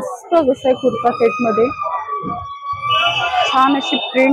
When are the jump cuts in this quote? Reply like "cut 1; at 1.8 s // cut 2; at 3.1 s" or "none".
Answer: none